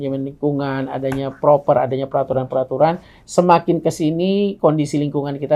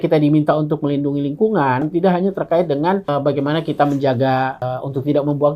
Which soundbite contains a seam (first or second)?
second